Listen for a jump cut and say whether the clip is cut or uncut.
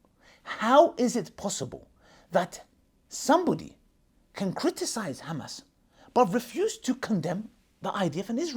uncut